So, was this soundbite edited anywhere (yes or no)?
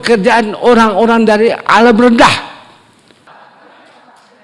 yes